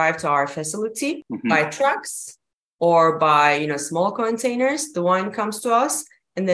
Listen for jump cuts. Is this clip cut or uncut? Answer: cut